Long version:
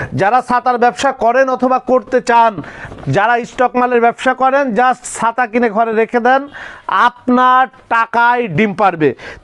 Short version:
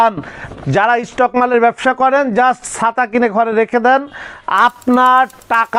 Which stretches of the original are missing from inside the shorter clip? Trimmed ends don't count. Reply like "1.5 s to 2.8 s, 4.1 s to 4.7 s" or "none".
none